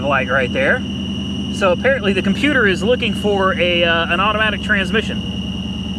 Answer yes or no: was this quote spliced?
no